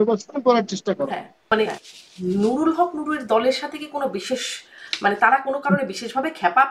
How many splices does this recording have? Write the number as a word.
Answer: one